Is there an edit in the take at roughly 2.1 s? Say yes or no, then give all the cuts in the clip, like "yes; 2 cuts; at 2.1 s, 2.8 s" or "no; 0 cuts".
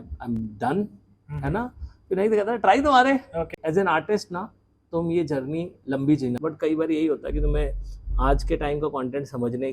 no; 2 cuts; at 3.6 s, 6.4 s